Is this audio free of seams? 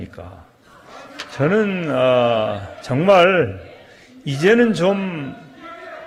yes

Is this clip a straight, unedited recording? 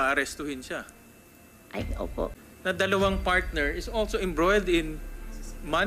no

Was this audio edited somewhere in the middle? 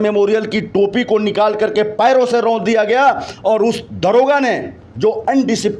no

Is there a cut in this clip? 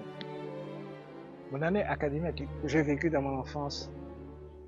yes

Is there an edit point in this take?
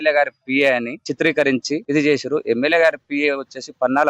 yes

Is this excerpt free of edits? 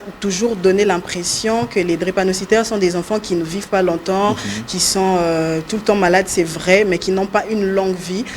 yes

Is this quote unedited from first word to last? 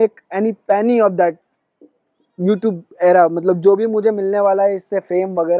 yes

